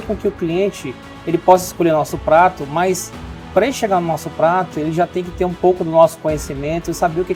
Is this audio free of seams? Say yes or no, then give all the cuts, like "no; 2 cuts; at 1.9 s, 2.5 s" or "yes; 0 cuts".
yes; 0 cuts